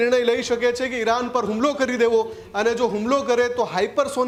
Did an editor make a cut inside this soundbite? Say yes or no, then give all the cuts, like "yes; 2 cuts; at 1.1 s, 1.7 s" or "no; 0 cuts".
no; 0 cuts